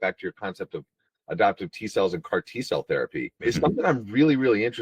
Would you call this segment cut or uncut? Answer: cut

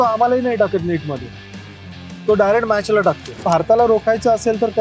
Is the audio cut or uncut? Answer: cut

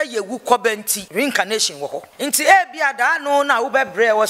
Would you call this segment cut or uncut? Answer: cut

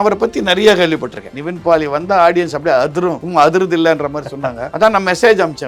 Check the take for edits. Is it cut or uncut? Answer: cut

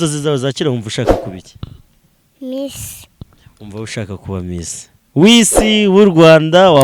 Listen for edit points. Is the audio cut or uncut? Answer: uncut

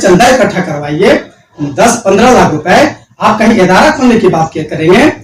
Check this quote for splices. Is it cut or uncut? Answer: uncut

